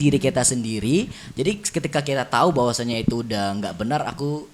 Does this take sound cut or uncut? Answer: uncut